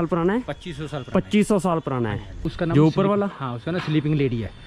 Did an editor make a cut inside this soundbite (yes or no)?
yes